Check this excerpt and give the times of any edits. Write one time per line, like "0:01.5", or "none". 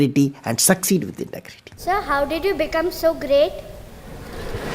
0:01.8